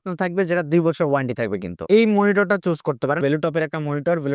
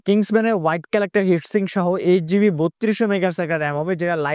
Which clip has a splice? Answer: first; 2 cuts; at 1.8 s, 3.2 s

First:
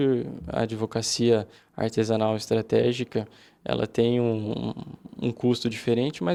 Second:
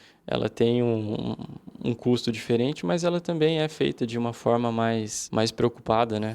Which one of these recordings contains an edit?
second; 1 cut; at 5.2 s

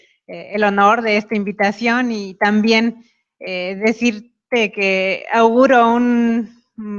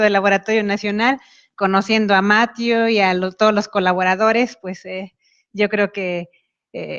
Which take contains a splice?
first; 1 cut; at 2.1 s

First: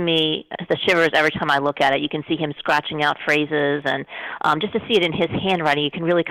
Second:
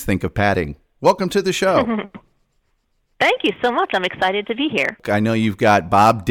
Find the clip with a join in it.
second; 1 cut; at 5.0 s

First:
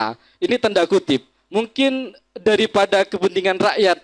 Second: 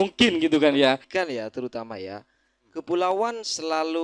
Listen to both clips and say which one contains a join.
second; 1 cut; at 1.1 s

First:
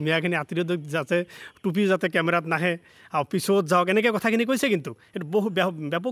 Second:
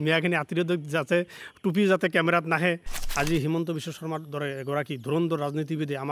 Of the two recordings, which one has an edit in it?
second; 1 cut; at 2.9 s

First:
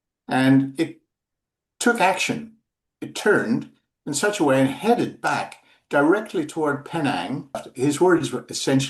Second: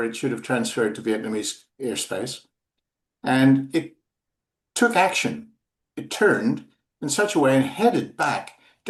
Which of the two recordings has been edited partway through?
first; 1 cut; at 7.7 s

